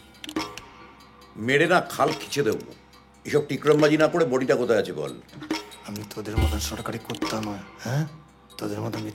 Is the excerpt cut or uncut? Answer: uncut